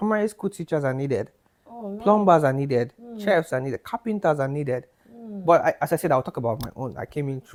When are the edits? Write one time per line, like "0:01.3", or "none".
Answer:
none

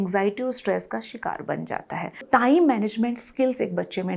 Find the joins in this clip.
0:02.2

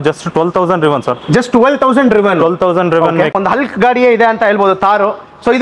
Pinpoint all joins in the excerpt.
0:03.3

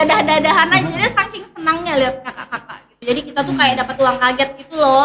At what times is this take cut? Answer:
0:02.9

